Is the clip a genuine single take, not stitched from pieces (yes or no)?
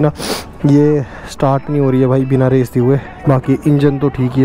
no